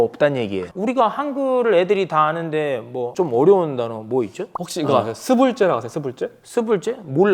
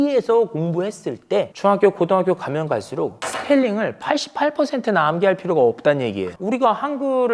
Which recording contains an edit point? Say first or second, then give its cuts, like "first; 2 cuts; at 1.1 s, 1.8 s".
second; 2 cuts; at 1.5 s, 3.3 s